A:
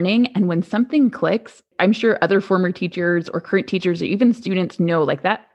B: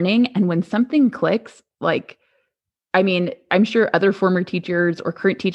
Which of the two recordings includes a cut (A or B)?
A